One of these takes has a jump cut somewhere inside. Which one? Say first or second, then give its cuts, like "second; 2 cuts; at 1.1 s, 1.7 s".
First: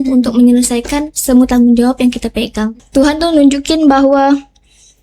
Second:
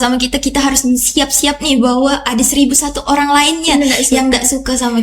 first; 1 cut; at 2.8 s